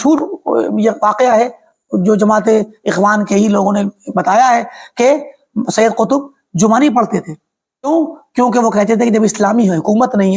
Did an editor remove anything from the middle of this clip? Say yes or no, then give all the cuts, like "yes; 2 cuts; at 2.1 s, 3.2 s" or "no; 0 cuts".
yes; 1 cut; at 7.9 s